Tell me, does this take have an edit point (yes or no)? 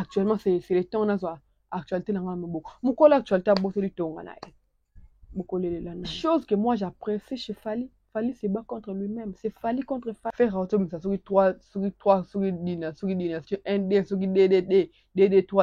yes